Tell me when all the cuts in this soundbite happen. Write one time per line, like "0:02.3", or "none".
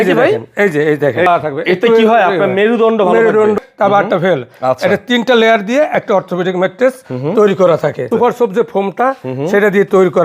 0:01.3
0:03.6
0:08.1